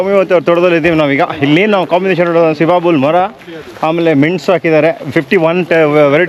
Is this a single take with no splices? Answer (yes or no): yes